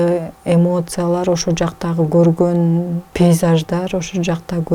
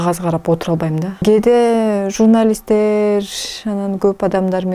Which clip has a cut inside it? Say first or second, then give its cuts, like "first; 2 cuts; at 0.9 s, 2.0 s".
second; 1 cut; at 1.2 s